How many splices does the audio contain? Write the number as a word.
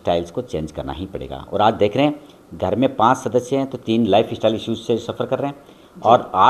zero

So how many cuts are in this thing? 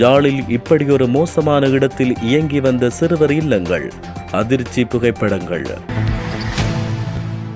one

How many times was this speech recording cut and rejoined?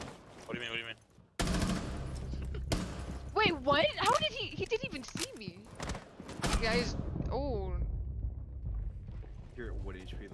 one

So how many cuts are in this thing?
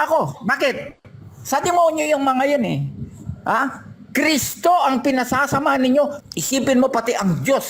one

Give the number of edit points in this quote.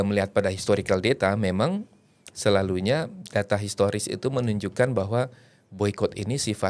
zero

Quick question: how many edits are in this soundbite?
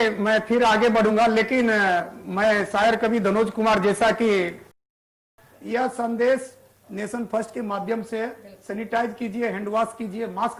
one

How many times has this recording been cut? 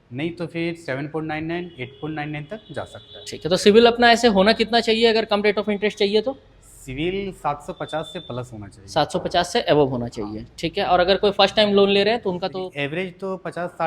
one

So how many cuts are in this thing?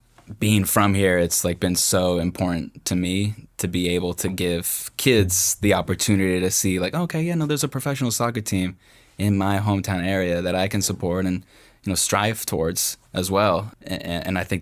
one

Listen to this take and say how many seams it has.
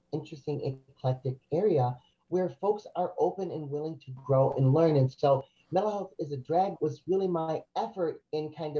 two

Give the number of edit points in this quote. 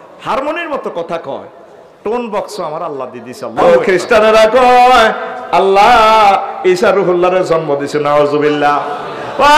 one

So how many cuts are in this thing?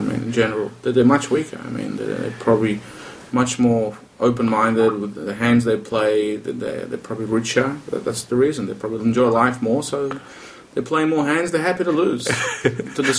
zero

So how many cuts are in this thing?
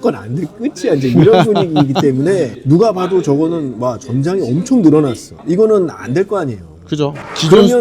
one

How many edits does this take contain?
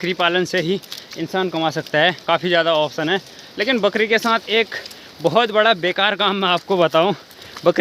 zero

